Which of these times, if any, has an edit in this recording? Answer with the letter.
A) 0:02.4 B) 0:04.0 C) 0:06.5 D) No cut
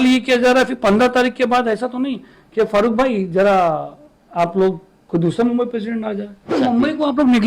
C